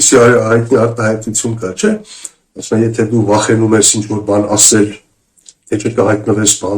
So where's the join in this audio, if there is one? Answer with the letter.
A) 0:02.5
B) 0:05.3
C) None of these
C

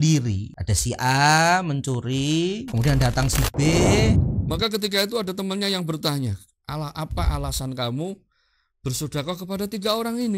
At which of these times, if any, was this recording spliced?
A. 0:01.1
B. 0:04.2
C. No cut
B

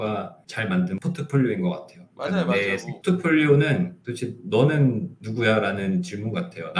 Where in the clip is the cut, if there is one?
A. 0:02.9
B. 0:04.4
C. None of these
A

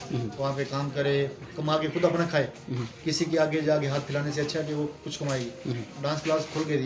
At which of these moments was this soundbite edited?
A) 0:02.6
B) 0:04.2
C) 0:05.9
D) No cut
C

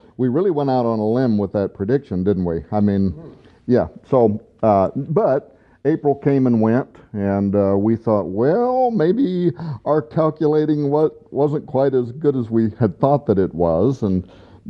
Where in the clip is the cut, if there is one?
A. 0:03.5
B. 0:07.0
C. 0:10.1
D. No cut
B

